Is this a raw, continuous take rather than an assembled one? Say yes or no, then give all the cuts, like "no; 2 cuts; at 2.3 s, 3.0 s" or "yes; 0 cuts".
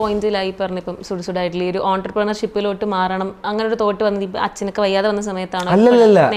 yes; 0 cuts